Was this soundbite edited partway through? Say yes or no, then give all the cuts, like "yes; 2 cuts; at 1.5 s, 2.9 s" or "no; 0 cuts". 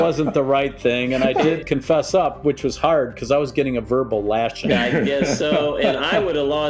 yes; 2 cuts; at 1.6 s, 4.6 s